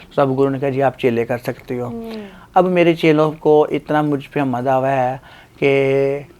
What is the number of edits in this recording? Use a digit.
0